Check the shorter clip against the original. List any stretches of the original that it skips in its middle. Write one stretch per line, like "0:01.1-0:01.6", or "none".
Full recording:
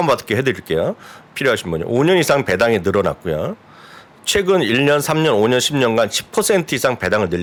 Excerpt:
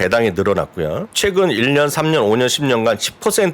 0:03.5-0:04.2

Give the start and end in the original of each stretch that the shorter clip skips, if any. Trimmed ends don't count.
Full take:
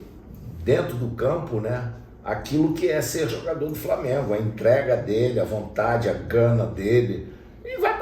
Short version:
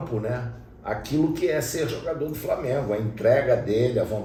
none

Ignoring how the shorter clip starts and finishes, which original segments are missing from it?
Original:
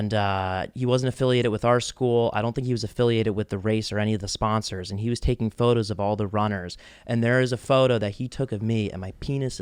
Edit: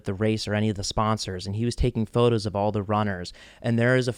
none

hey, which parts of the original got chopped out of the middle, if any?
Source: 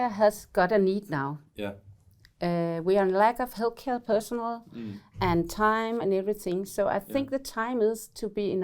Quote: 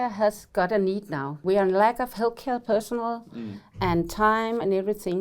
0:01.4-0:02.8

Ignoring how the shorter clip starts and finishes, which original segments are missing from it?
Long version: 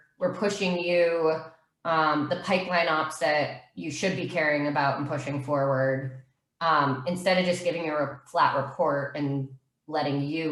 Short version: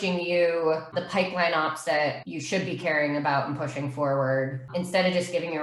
0:01.6-0:02.3
0:03.6-0:03.8
0:06.2-0:07.0

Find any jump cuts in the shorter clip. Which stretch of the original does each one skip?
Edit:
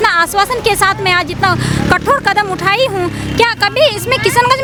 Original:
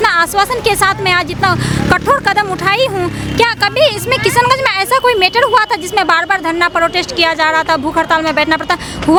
none

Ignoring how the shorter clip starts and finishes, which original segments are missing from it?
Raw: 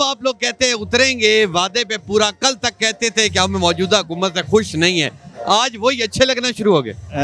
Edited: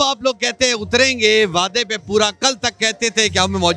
none

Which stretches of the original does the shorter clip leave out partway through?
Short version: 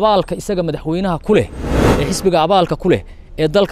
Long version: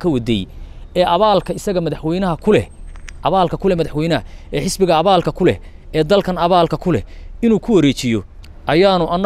0:03.0-0:04.4

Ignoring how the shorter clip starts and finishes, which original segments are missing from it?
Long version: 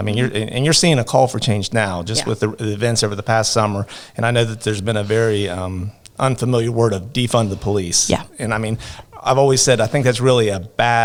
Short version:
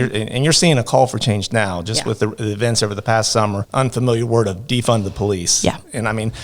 0:03.8-0:06.1

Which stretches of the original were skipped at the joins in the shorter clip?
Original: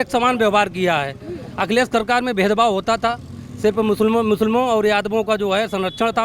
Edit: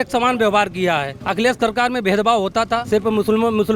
0:01.2-0:01.5
0:03.2-0:03.6

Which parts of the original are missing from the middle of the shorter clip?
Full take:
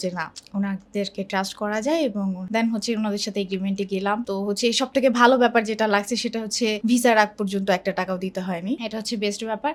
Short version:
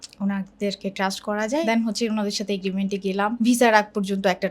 0:02.0-0:02.5
0:04.2-0:06.8

